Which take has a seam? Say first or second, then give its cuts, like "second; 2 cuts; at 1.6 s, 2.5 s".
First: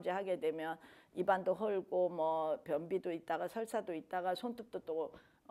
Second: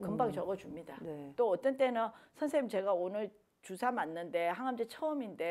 second; 1 cut; at 1.3 s